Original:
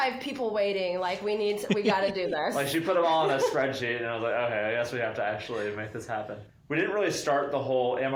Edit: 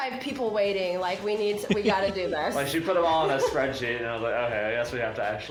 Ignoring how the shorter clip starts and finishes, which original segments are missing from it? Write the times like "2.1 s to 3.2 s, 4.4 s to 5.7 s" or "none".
none